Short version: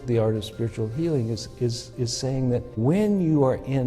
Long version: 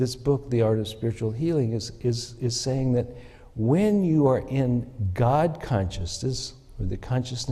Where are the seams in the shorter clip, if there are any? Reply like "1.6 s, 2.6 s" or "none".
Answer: 2.7 s